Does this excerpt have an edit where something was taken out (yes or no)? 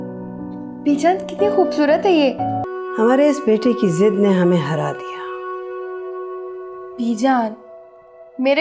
yes